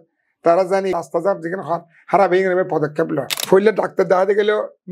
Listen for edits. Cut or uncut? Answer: cut